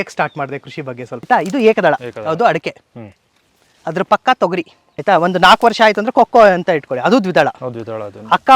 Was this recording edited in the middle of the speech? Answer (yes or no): yes